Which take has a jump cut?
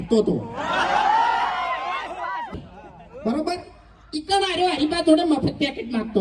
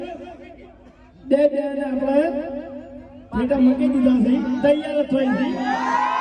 first; 1 cut; at 2.5 s

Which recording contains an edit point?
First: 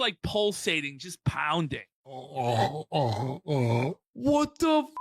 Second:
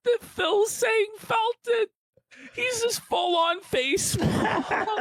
first; 2 cuts; at 2.3 s, 4.0 s

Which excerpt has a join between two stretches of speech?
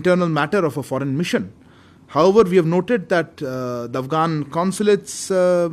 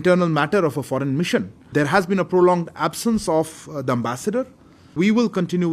second; 2 cuts; at 1.6 s, 4.9 s

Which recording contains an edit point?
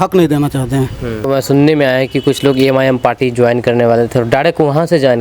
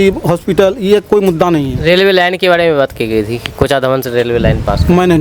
first; 1 cut; at 1.3 s

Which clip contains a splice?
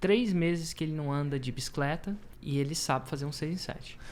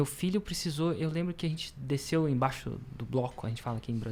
first; 1 cut; at 2.3 s

